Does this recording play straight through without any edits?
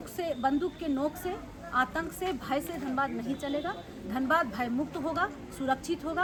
yes; 0 cuts

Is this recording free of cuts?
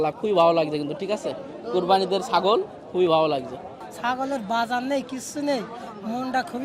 yes; 0 cuts

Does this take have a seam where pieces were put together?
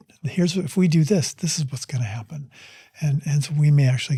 no; 0 cuts

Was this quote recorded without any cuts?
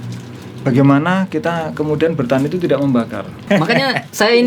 no; 1 cut; at 3.5 s

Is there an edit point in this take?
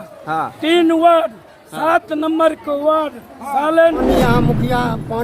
yes; 1 cut; at 4.0 s

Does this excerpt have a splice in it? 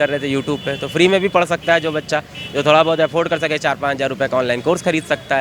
no; 0 cuts

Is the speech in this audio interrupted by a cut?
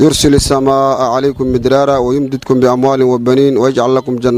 no; 0 cuts

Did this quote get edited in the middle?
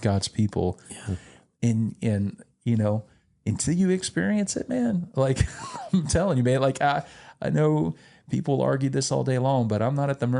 no; 0 cuts

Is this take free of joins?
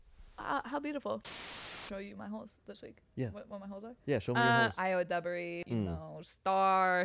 no; 3 cuts; at 1.5 s, 4.7 s, 5.6 s

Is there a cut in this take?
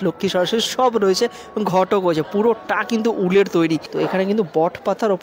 yes; 1 cut; at 3.9 s

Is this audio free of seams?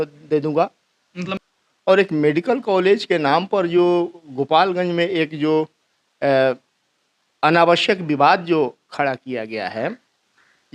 no; 1 cut; at 1.3 s

